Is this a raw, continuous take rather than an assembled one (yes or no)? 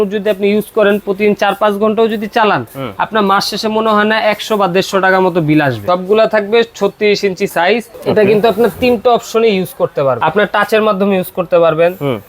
no